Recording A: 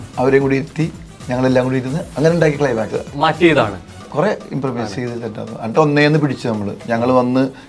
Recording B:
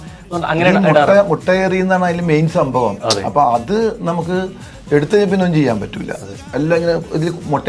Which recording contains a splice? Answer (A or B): A